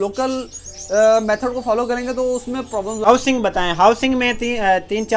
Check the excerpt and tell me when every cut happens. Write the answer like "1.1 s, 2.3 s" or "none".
3.0 s